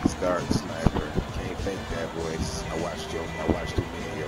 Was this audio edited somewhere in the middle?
no; 0 cuts

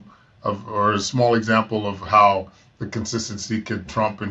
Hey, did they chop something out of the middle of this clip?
no; 0 cuts

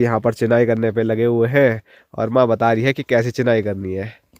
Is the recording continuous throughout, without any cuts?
yes; 0 cuts

